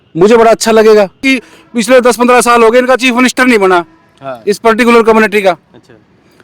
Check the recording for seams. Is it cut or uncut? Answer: cut